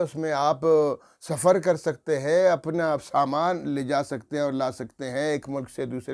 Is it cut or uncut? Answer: uncut